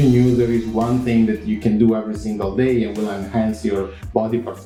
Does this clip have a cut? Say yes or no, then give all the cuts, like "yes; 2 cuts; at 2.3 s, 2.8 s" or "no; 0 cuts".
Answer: no; 0 cuts